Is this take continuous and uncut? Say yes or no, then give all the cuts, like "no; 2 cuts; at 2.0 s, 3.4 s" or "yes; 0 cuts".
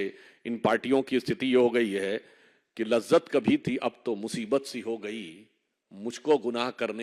yes; 0 cuts